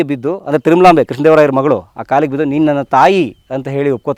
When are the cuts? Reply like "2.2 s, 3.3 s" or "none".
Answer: none